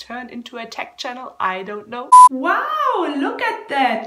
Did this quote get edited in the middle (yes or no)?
no